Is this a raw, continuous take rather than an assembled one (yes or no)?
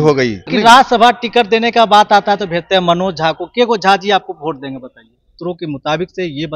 no